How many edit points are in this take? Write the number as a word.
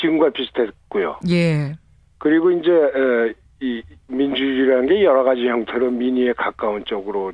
zero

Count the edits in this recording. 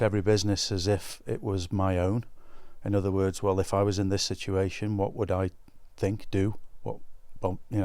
zero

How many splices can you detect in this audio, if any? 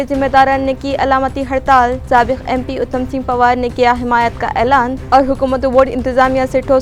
zero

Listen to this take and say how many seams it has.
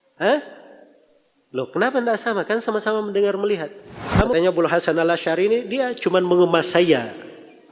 one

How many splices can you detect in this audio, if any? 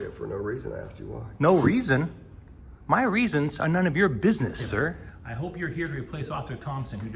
one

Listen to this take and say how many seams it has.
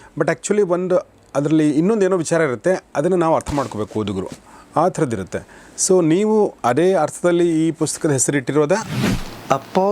one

